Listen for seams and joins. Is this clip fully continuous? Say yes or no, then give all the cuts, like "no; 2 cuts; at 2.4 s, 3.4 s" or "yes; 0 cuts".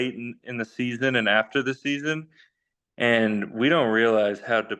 yes; 0 cuts